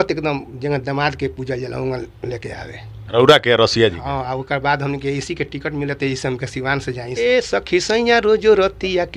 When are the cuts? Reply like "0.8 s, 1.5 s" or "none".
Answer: 7.1 s